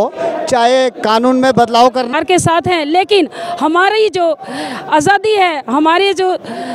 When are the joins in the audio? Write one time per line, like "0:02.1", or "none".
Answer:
0:02.1